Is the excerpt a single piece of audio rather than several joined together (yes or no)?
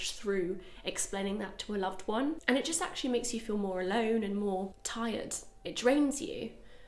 yes